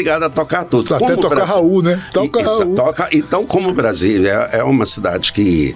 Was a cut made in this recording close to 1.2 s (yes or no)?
no